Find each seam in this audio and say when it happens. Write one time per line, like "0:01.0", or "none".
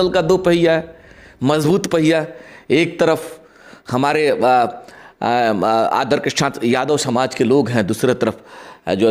none